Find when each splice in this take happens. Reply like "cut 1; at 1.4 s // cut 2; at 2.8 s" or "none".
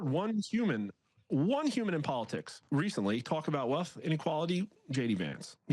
cut 1; at 2.5 s